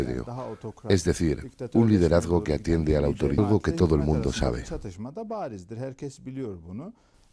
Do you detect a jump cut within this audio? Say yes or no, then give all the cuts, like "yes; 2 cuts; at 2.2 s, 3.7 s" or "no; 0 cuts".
no; 0 cuts